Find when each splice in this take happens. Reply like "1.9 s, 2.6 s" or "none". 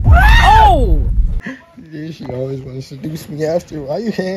1.3 s